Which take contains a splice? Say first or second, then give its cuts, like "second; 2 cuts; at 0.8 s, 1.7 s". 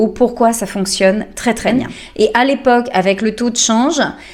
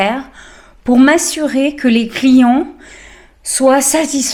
first; 1 cut; at 1.7 s